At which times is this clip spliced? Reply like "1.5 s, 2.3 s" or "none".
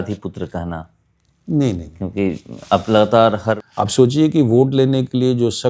3.6 s